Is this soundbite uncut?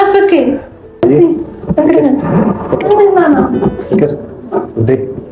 no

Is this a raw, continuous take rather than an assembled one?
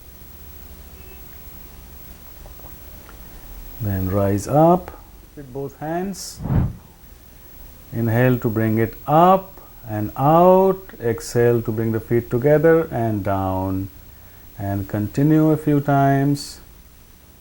no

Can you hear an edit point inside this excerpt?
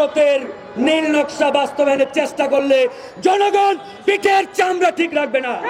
no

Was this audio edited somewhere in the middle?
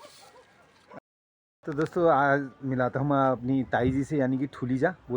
yes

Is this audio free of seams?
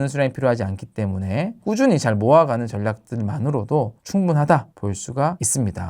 no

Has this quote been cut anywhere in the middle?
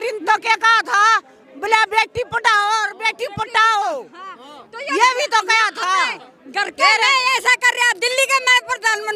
no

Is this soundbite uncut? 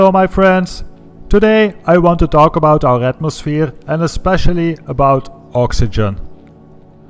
yes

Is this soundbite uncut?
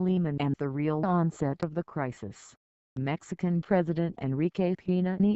no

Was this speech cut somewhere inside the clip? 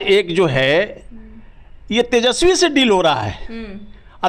no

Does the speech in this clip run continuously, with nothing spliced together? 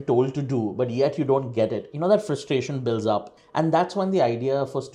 yes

